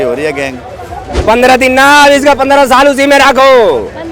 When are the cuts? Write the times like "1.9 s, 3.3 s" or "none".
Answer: 1.1 s